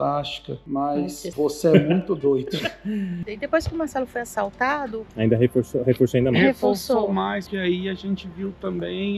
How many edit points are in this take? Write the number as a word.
three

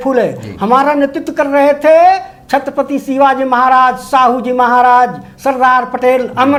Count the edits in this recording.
zero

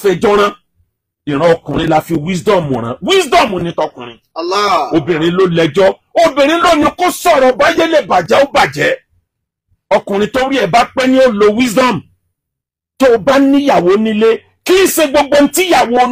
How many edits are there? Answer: zero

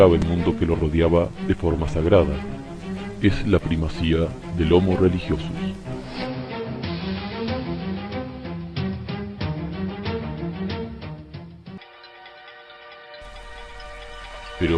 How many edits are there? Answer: zero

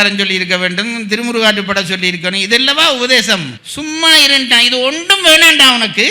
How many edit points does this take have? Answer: zero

